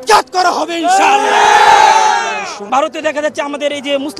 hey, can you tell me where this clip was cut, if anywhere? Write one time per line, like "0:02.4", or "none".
0:02.7